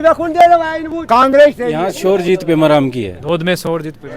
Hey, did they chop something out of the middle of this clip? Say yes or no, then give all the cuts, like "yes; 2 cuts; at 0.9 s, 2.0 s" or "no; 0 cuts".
yes; 1 cut; at 1.8 s